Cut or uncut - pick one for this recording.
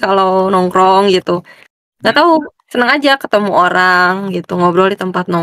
uncut